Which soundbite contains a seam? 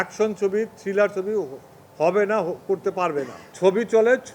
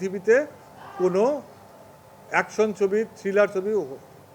first; 1 cut; at 3.4 s

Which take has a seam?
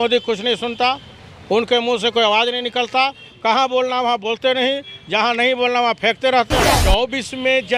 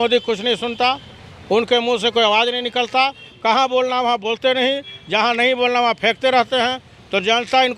first; 1 cut; at 6.7 s

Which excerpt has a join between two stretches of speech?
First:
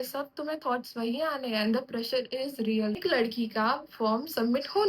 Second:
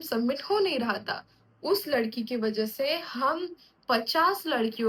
first; 1 cut; at 3.0 s

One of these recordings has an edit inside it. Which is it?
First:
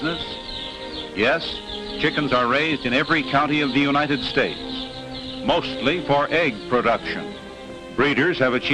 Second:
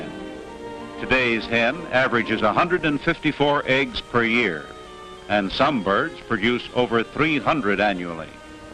second; 1 cut; at 6.2 s

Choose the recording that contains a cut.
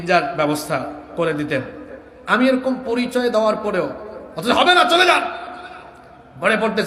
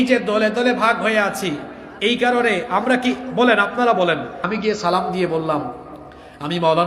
second; 1 cut; at 4.4 s

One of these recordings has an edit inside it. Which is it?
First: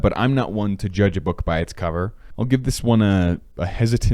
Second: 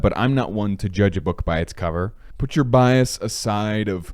second; 1 cut; at 2.2 s

